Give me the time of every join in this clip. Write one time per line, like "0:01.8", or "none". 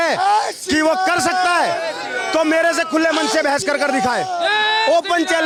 none